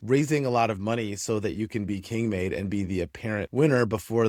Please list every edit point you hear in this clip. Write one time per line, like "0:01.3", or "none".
none

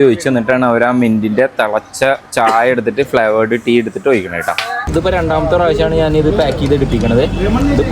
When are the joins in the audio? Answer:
0:04.8

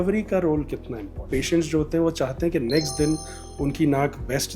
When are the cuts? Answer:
0:01.3

